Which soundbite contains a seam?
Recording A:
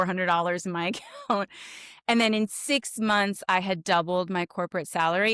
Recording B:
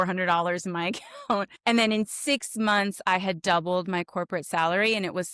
B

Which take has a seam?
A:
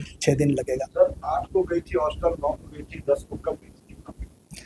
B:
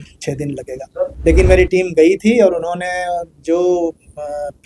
B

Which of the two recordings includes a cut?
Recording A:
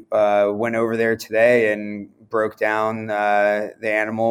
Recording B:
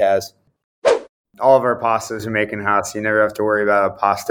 B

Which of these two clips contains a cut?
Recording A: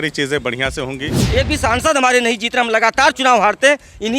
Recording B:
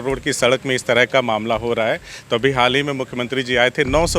A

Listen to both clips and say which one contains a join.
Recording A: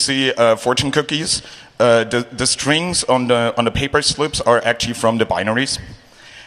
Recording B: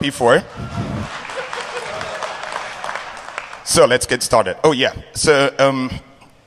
A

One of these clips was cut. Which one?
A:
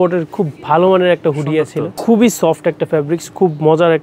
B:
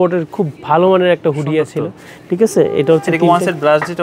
A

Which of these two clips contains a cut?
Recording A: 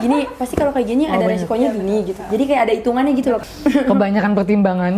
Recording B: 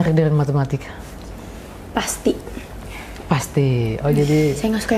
A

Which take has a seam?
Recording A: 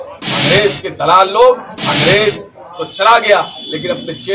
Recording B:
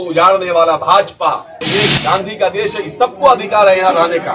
B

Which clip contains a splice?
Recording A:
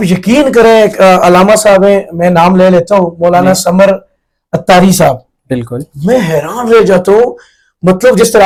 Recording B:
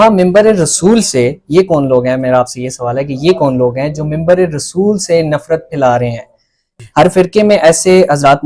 B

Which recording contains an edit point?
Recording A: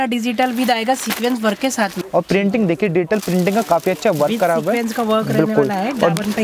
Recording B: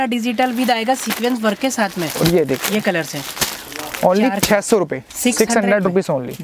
A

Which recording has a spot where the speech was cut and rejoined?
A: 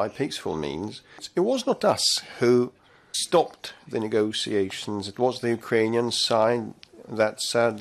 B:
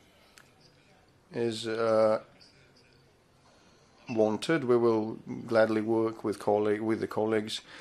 A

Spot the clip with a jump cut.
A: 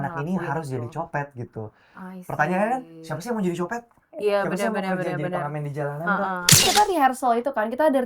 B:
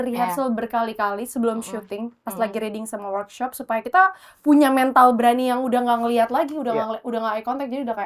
A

